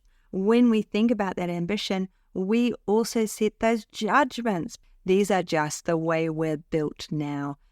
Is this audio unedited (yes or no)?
no